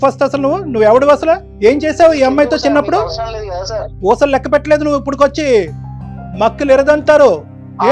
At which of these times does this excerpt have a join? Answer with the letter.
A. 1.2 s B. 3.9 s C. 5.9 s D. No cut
B